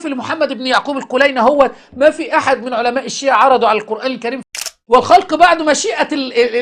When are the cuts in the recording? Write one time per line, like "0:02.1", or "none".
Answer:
0:04.5